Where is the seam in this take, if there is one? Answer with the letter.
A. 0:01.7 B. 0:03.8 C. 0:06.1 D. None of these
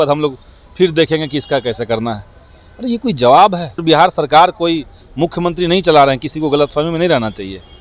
B